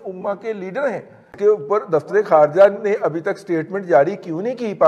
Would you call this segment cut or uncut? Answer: cut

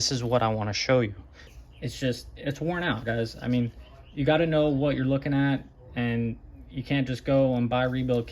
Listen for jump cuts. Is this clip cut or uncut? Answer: cut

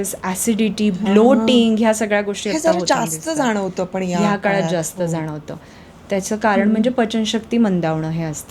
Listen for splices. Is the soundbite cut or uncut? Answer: uncut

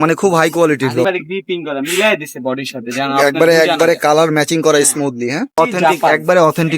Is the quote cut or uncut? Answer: cut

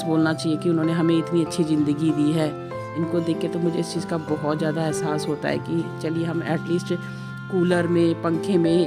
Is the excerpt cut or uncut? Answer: uncut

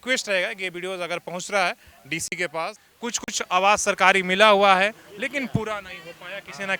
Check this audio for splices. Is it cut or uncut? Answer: cut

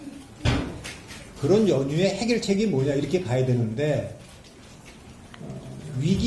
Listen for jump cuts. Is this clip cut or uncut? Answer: uncut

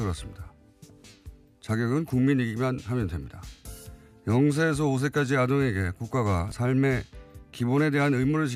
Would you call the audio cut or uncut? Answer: cut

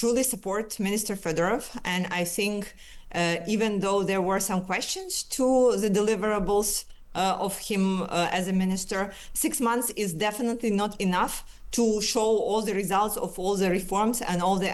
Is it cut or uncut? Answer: uncut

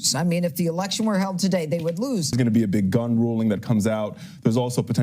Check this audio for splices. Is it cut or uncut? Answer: cut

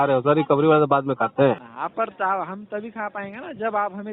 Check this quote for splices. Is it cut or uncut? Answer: cut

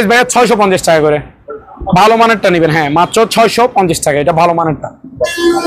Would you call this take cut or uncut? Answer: uncut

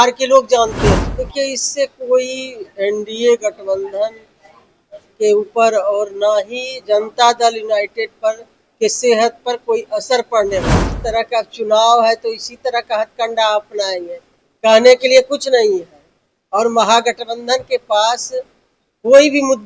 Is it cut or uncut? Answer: cut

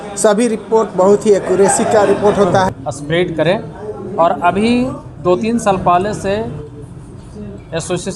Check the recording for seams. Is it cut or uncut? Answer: cut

